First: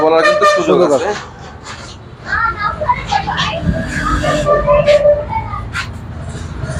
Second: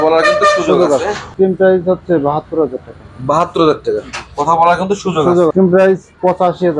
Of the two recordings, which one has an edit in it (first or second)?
second